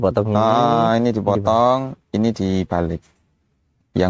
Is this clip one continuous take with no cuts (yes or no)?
yes